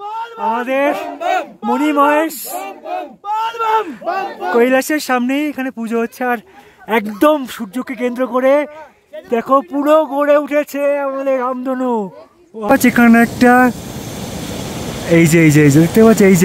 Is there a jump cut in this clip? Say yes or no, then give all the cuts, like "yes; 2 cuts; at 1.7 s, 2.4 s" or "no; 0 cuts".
yes; 1 cut; at 12.7 s